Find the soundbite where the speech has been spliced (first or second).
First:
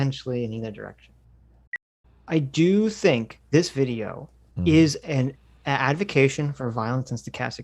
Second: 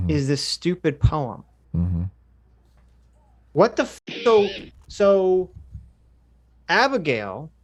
first